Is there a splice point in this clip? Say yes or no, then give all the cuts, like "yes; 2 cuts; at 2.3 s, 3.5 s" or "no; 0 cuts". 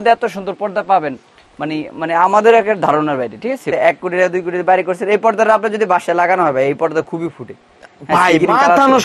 yes; 1 cut; at 3.7 s